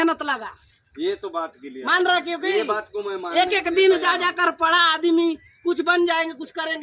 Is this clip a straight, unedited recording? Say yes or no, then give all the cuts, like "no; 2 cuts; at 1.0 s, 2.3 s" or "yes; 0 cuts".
yes; 0 cuts